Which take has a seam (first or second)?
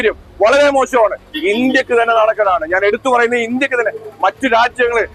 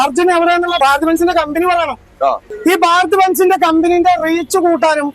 second